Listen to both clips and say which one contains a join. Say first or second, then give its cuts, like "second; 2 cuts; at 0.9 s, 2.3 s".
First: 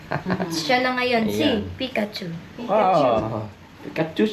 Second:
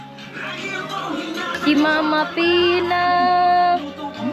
second; 1 cut; at 1.5 s